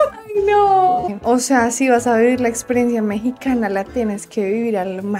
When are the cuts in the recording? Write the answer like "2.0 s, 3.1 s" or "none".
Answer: 1.1 s